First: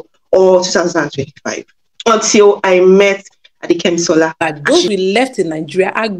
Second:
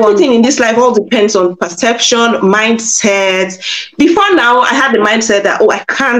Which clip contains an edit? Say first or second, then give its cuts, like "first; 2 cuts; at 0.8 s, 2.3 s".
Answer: first; 1 cut; at 4.4 s